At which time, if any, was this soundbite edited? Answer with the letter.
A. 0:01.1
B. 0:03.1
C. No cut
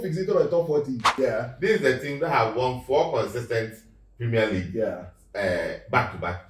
A